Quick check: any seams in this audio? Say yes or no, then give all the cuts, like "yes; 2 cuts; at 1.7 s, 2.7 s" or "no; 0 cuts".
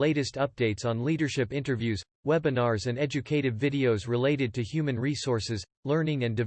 no; 0 cuts